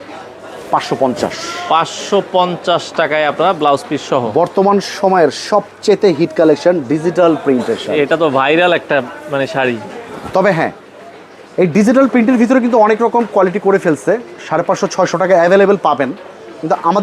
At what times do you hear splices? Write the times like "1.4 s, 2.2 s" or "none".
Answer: none